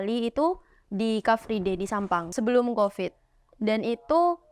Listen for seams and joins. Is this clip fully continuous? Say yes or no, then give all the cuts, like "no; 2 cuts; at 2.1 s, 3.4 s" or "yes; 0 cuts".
no; 1 cut; at 2.3 s